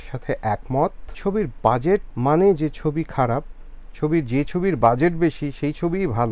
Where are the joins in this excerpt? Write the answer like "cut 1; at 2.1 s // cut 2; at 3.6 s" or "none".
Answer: cut 1; at 1.1 s // cut 2; at 2.1 s